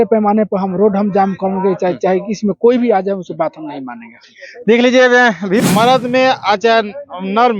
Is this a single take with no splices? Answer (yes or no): no